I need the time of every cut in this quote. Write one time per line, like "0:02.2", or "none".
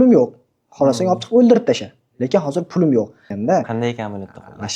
0:03.3

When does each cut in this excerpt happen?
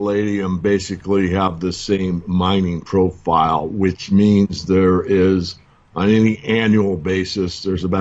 none

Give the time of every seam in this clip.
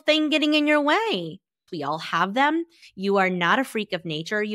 0:01.7

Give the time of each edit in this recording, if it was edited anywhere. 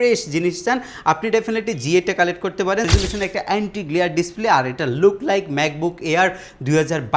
0:02.9

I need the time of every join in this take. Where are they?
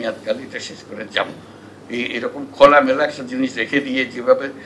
none

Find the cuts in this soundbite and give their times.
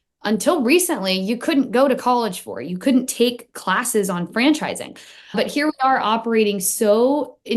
0:05.3

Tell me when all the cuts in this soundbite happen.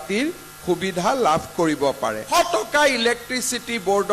0:02.2

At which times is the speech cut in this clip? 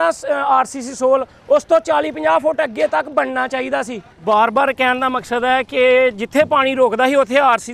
0:04.1

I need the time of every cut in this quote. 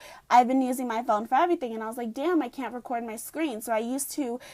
0:01.9

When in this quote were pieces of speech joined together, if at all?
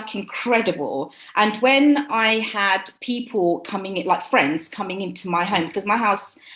none

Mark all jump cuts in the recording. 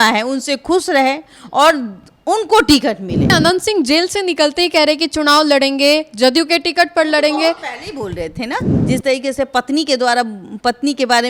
0:03.3
0:08.7

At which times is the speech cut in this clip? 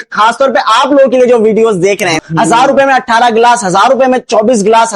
0:02.2

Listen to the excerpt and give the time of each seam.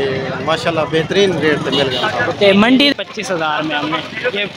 0:02.9

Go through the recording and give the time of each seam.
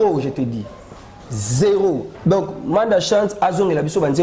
0:02.1

